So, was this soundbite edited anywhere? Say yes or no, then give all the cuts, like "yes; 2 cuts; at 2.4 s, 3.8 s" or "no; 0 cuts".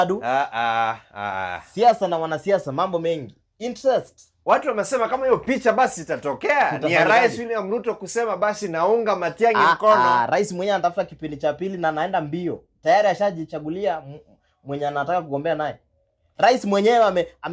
no; 0 cuts